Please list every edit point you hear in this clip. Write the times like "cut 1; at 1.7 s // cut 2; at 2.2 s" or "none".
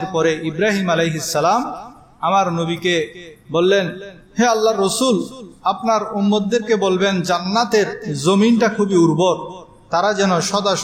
none